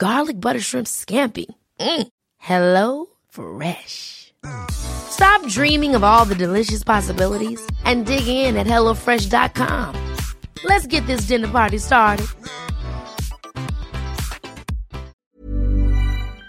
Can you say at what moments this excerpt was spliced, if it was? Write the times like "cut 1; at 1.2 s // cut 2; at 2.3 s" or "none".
cut 1; at 15.4 s